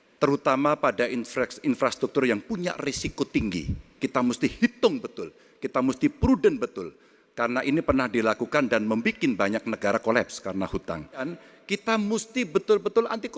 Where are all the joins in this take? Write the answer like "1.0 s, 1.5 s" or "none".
11.3 s